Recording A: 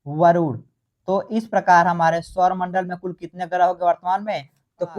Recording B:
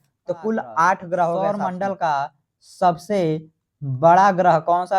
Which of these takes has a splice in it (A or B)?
B